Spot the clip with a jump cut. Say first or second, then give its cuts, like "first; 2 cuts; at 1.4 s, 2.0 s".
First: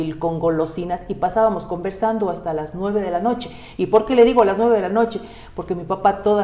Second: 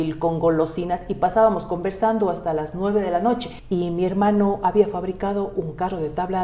second; 1 cut; at 3.5 s